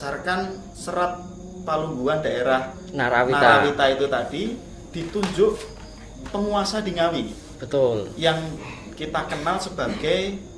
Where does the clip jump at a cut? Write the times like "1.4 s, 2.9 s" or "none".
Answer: none

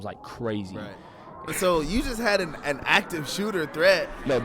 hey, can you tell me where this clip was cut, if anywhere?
1.5 s

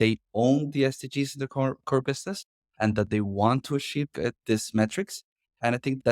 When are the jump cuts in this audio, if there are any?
none

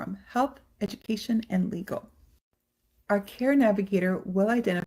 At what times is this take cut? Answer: 3.8 s

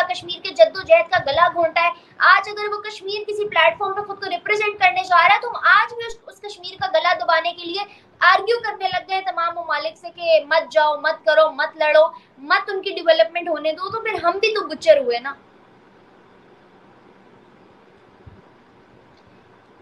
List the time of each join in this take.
none

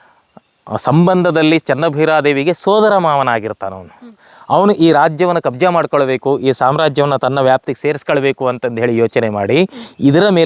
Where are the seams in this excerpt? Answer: none

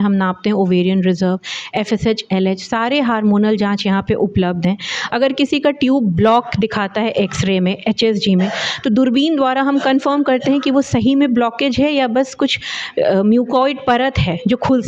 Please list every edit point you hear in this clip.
none

